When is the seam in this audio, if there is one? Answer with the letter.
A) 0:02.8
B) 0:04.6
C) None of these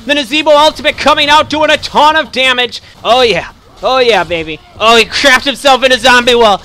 A